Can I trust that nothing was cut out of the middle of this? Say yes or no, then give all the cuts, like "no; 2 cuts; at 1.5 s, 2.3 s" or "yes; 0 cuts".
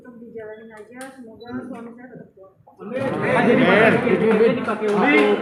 yes; 0 cuts